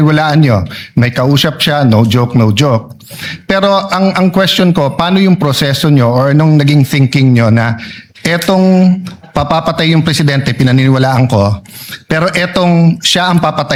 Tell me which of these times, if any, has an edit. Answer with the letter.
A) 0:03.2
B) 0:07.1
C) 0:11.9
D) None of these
D